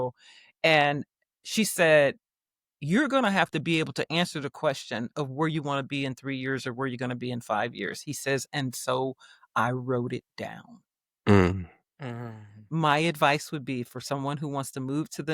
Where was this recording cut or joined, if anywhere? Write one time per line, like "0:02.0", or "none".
none

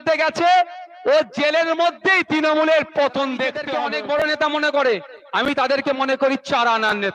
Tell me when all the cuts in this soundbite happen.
0:03.7

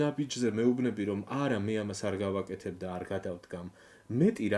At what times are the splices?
none

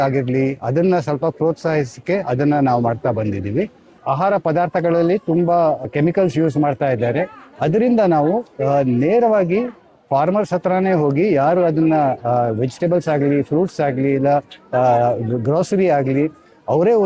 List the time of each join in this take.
0:04.0
0:05.8

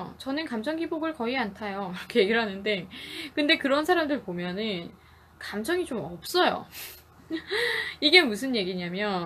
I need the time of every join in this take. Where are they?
none

